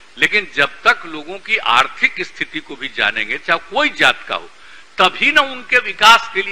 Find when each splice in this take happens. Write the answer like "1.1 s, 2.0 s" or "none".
none